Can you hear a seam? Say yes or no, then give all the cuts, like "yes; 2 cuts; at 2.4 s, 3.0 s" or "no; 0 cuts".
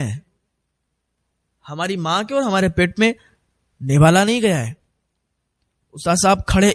no; 0 cuts